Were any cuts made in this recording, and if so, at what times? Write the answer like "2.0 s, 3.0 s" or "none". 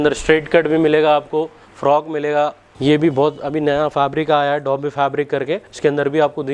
2.7 s, 5.7 s